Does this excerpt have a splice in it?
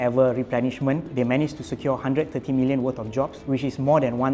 yes; 2 cuts; at 1.1 s, 3.4 s

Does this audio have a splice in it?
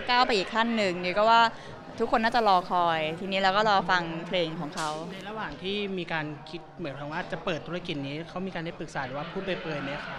no; 0 cuts

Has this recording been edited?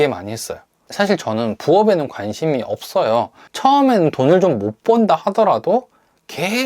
yes; 1 cut; at 3.4 s

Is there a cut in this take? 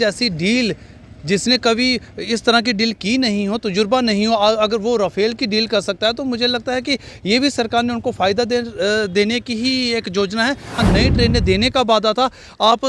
yes; 1 cut; at 10.8 s

